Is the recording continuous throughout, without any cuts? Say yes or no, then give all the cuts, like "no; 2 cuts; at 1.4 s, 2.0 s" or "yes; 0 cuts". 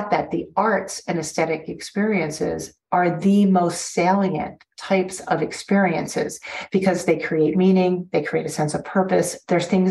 yes; 0 cuts